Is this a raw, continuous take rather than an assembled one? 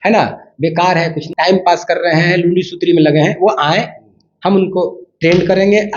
no; 1 cut; at 1.2 s

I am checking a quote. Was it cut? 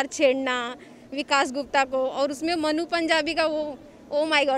no; 0 cuts

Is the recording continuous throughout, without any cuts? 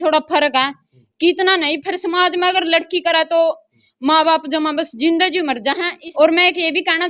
no; 1 cut; at 6.0 s

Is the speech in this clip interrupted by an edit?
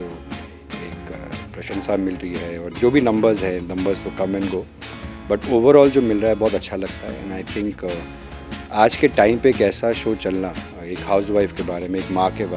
no; 0 cuts

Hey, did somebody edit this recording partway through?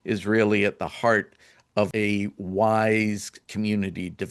yes; 2 cuts; at 1.9 s, 3.4 s

